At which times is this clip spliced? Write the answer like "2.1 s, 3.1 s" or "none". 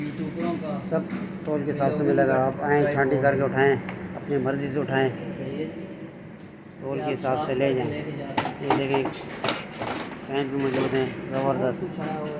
none